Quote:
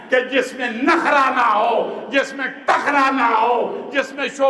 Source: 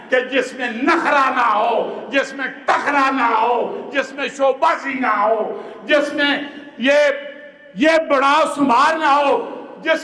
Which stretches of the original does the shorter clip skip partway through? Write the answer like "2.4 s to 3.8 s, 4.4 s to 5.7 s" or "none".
none

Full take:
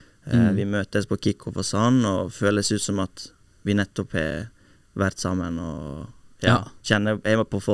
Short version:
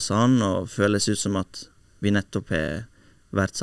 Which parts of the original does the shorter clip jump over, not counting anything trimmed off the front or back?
none

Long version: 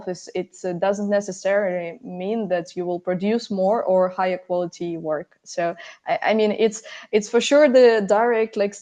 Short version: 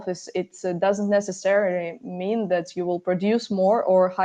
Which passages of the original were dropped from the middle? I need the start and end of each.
none

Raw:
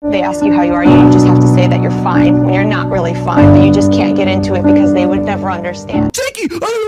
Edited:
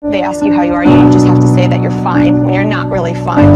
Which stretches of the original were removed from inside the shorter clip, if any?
none

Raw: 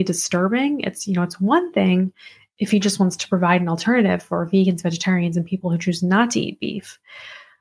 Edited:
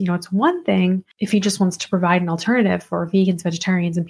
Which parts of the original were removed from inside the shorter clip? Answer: 2.2 s to 2.5 s

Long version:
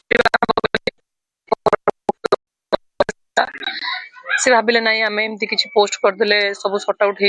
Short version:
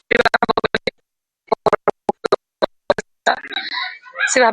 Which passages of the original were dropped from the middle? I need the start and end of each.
2.5 s to 2.6 s

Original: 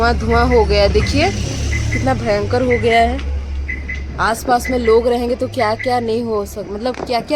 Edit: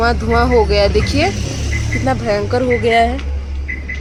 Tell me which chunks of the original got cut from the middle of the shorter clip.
none

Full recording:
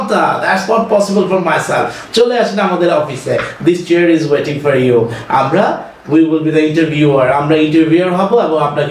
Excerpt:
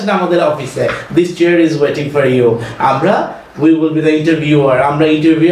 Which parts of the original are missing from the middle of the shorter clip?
none

